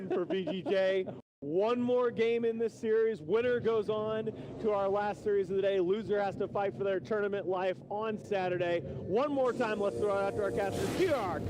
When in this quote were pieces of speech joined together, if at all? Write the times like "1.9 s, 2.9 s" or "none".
7.9 s